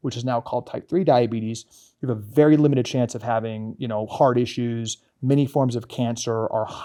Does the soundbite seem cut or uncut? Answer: uncut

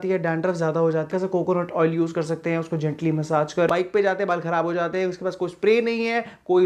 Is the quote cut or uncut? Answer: cut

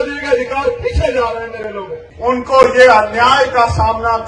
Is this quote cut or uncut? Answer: cut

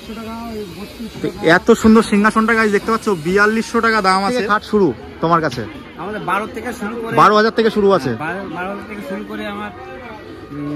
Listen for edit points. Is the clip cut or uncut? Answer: cut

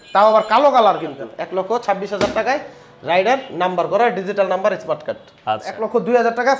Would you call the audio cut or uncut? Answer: cut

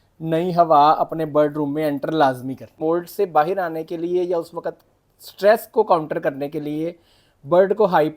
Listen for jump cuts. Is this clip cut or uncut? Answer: cut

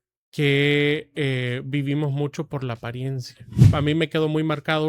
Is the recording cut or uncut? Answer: cut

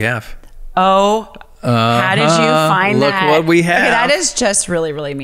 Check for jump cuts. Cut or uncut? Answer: uncut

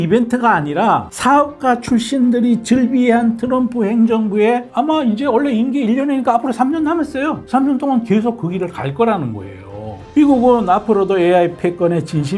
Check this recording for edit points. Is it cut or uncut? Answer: cut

